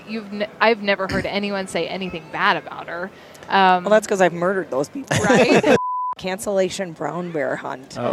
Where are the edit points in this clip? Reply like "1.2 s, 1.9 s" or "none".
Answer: 5.8 s